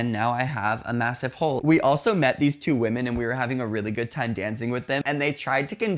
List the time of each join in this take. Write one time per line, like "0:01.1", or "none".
0:01.6
0:05.0